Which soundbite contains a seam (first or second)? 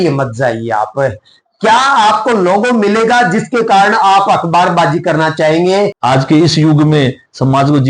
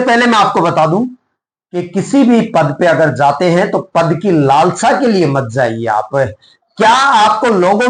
first